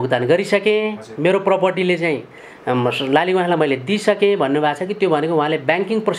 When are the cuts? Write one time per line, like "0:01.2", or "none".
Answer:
none